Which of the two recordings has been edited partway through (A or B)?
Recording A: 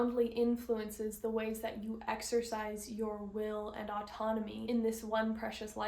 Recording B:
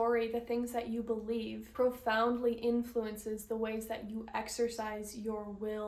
A